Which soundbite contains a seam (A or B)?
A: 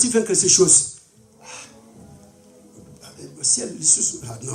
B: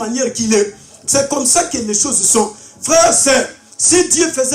A